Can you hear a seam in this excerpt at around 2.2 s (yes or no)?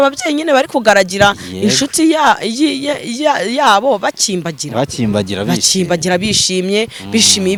no